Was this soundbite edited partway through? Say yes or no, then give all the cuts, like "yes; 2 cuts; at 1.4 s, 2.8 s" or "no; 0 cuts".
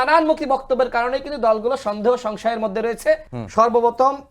yes; 1 cut; at 3.4 s